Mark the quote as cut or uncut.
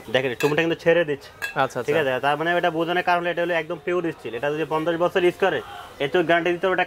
uncut